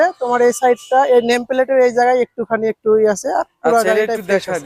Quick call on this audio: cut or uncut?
uncut